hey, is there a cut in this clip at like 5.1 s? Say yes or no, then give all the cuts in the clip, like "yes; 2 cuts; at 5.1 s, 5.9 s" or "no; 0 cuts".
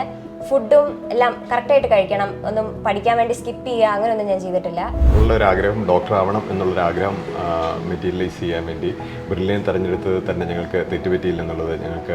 yes; 1 cut; at 5.1 s